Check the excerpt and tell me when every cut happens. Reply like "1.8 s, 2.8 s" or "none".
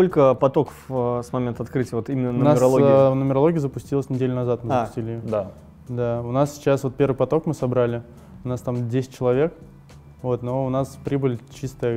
none